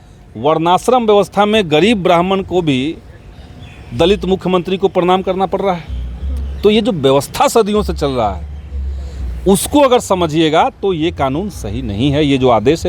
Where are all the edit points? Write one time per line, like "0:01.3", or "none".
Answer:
none